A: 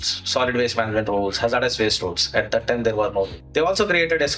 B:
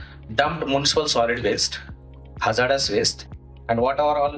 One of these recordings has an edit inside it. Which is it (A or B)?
A